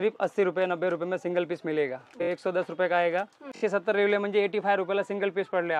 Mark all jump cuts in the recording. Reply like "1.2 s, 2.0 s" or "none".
2.3 s, 3.6 s